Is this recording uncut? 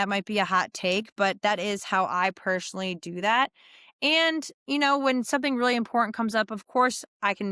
yes; 0 cuts

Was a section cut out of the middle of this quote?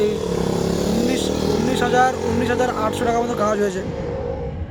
no; 0 cuts

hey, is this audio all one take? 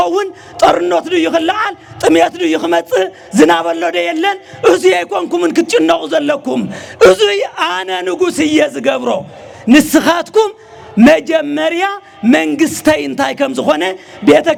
yes; 0 cuts

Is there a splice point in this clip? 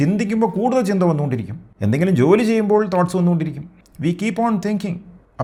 no; 0 cuts

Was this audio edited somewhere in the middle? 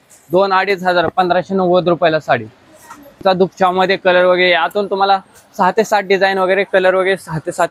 yes; 1 cut; at 3.2 s

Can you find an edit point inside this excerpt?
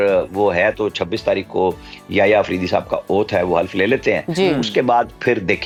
no; 0 cuts

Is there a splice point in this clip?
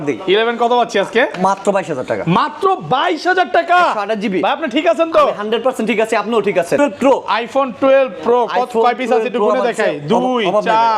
yes; 1 cut; at 6.8 s

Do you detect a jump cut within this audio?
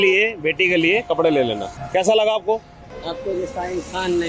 yes; 2 cuts; at 1.7 s, 2.9 s

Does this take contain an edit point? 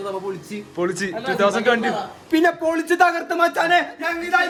no; 0 cuts

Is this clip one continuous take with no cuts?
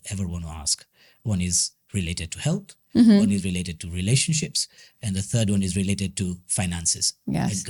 yes; 0 cuts

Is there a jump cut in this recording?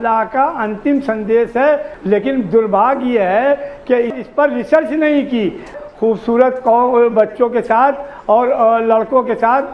yes; 2 cuts; at 1.9 s, 5.7 s

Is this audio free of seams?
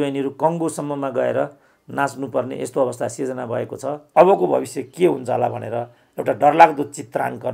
no; 1 cut; at 4.0 s

